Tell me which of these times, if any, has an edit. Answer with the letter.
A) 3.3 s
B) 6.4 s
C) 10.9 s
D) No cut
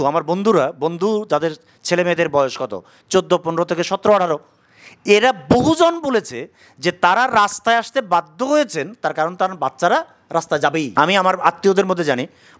C